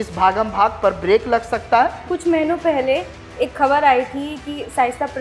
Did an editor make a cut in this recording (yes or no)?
yes